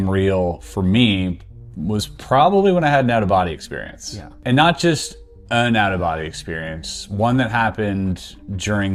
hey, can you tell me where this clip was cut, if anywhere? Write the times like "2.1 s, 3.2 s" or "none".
none